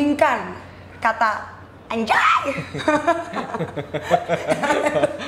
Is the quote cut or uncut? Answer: uncut